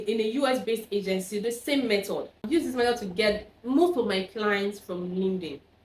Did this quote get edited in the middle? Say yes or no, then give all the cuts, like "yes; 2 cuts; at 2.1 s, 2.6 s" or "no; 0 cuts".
yes; 1 cut; at 2.5 s